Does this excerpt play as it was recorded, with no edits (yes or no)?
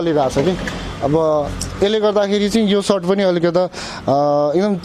yes